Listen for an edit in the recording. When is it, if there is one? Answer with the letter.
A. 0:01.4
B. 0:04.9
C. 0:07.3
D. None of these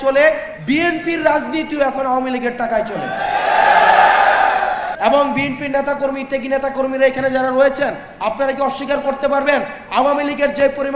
B